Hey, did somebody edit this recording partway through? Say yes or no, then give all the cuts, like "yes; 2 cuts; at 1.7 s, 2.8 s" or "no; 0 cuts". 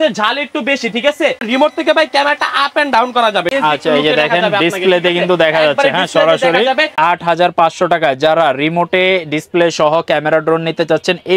yes; 3 cuts; at 1.5 s, 3.5 s, 7.0 s